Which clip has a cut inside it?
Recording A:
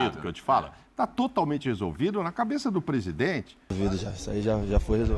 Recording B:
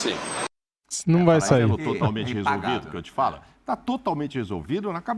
A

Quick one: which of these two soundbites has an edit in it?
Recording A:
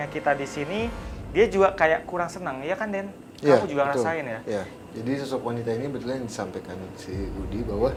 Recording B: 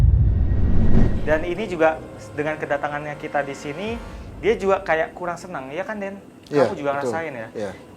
B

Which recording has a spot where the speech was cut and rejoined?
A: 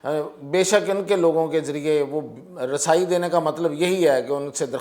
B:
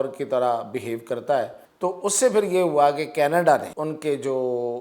B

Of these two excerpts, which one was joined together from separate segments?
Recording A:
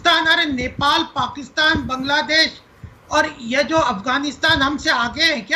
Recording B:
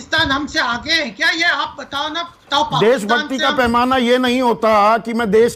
B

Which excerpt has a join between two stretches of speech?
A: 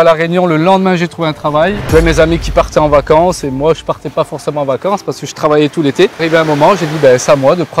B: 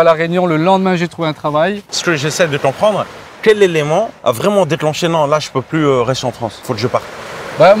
A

